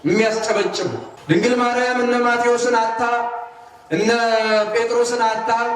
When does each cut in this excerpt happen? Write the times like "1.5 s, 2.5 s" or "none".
1.1 s